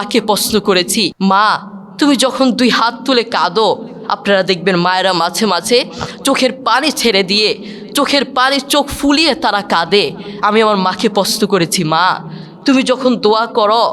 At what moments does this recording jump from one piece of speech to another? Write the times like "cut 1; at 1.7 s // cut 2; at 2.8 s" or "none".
cut 1; at 1.1 s

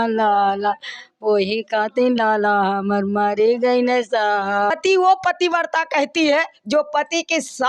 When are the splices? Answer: cut 1; at 4.7 s

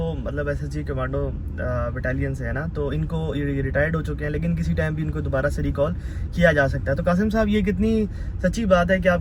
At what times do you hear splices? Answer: none

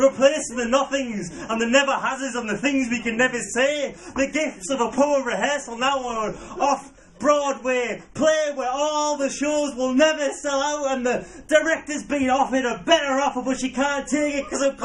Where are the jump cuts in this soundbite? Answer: none

